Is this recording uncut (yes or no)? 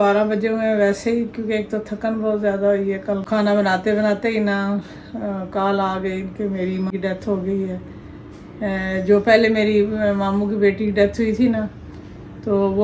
no